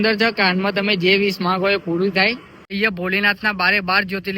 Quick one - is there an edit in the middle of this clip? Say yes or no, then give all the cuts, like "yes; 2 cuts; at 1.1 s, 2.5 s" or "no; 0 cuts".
yes; 1 cut; at 2.6 s